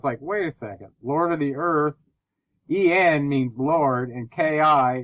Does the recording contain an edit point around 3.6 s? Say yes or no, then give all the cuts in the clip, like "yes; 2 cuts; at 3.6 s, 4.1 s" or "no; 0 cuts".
yes; 1 cut; at 3.6 s